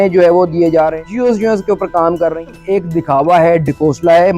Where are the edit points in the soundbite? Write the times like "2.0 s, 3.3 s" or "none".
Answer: 1.0 s, 2.4 s